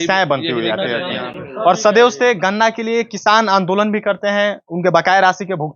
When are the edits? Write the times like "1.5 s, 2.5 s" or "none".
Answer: none

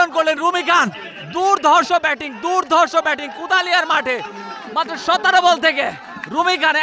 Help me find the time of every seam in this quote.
none

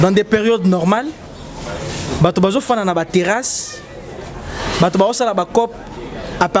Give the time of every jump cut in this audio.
none

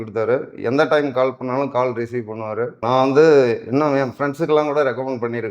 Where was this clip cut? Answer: 2.8 s

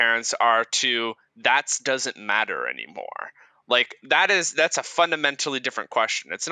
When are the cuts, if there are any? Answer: none

